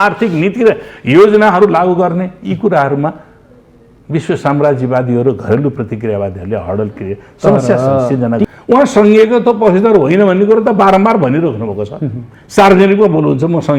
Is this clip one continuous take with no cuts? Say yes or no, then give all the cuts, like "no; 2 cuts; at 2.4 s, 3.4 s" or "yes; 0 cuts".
no; 1 cut; at 8.4 s